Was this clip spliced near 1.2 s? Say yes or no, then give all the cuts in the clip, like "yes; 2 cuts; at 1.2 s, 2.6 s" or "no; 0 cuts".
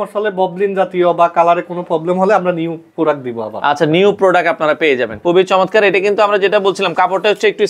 no; 1 cut; at 5.1 s